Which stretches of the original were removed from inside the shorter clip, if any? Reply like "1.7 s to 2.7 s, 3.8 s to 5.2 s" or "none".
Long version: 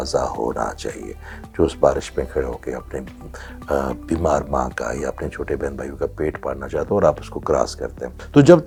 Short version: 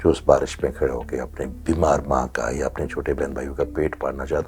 3.1 s to 4.0 s

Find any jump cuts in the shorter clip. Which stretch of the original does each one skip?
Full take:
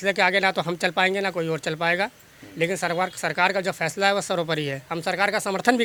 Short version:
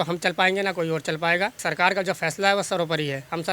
2.2 s to 3.2 s

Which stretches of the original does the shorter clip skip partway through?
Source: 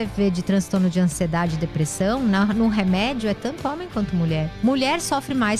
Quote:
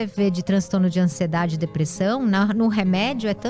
none

